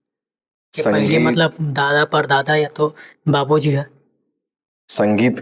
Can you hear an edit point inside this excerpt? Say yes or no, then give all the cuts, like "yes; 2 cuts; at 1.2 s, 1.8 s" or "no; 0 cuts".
no; 0 cuts